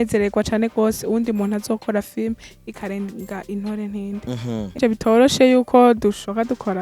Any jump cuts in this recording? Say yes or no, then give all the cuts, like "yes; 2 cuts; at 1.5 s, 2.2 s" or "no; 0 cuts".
yes; 1 cut; at 4.8 s